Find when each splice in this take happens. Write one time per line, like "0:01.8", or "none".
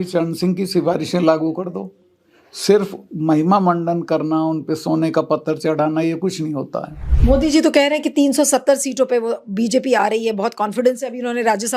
0:07.0